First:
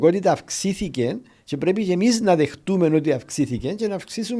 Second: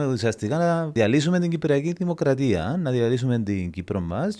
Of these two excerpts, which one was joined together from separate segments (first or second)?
second